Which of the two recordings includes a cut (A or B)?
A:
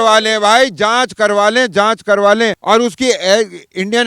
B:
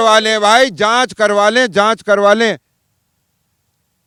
A